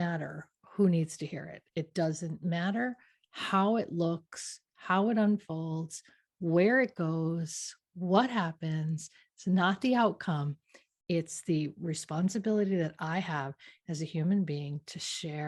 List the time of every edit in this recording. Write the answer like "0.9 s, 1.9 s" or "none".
none